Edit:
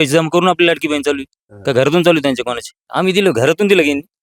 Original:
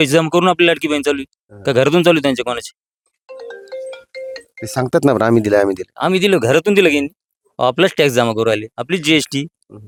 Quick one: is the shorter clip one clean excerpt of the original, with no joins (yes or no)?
no